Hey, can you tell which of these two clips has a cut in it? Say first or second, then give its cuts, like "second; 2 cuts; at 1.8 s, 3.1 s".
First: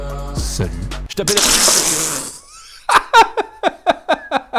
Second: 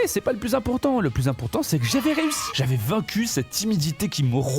first; 1 cut; at 1.2 s